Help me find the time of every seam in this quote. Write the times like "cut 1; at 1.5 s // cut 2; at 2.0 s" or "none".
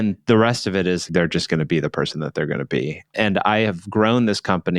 cut 1; at 1.0 s // cut 2; at 3.0 s